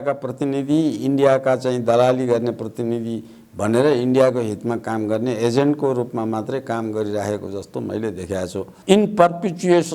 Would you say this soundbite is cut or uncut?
cut